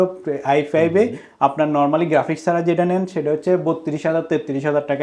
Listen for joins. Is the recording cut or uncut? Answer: uncut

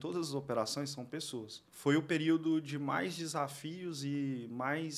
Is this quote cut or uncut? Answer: cut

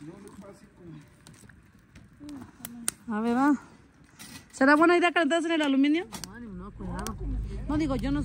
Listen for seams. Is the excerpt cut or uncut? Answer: uncut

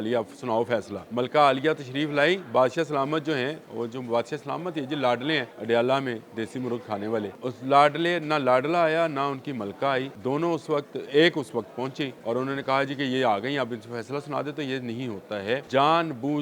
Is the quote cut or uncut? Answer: cut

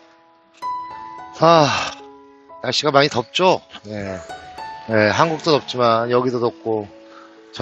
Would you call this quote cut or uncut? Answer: cut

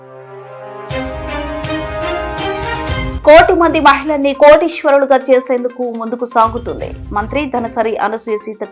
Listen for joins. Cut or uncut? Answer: cut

